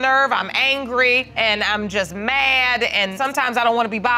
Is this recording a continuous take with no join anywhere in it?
no; 2 cuts; at 1.3 s, 3.1 s

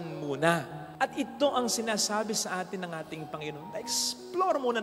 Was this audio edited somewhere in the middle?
no; 0 cuts

